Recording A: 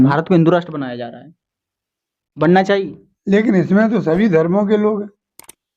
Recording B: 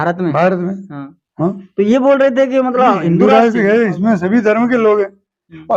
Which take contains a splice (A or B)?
B